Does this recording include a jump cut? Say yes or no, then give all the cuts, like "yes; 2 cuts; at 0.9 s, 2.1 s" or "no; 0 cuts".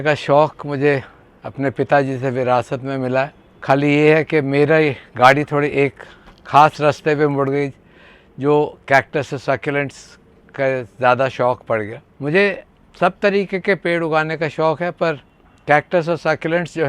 no; 0 cuts